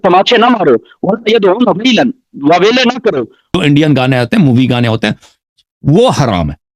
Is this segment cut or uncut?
cut